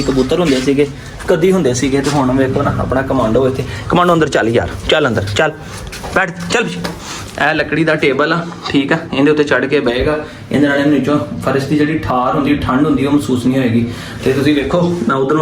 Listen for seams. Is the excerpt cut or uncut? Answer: uncut